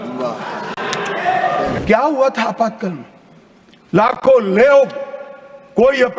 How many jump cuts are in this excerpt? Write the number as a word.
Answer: one